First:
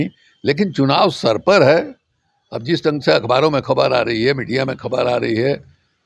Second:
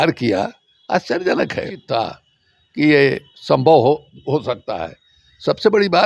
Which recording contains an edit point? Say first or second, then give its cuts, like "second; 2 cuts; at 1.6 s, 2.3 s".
second; 1 cut; at 1.8 s